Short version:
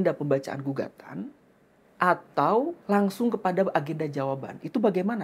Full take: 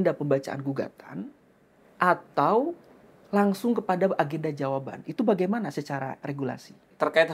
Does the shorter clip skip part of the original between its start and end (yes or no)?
yes